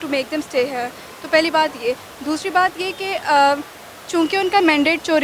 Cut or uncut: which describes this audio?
uncut